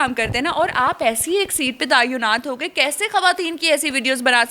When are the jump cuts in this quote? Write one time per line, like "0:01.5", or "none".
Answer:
none